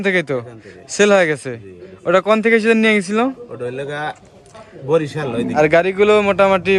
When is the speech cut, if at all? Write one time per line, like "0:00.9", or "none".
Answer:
0:05.5